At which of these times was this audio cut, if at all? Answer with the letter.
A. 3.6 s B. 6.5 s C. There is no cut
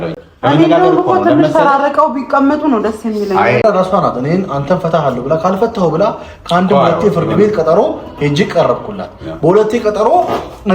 A